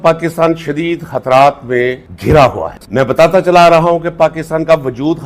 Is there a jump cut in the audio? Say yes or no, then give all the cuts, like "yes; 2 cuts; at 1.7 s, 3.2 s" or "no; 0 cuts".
yes; 1 cut; at 2.8 s